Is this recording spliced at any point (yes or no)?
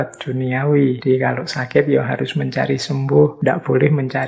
yes